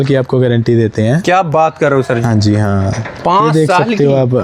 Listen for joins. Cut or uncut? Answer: uncut